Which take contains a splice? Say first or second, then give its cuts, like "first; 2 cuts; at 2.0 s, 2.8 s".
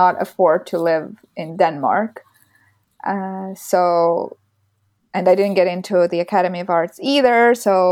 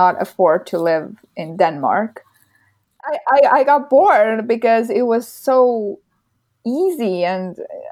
second; 1 cut; at 3.1 s